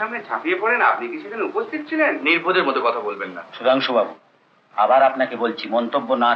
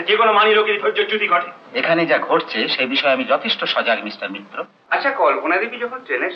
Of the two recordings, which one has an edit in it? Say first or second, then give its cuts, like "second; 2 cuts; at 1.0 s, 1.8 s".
second; 1 cut; at 4.8 s